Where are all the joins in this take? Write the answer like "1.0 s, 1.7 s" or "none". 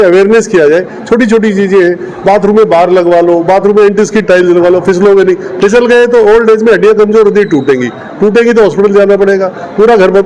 none